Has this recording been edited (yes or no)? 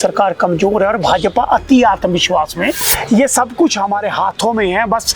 yes